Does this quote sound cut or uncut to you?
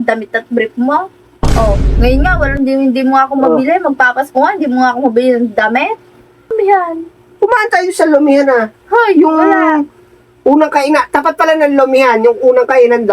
cut